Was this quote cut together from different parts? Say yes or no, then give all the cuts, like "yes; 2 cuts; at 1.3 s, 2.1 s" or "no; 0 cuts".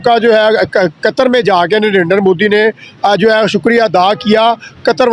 no; 0 cuts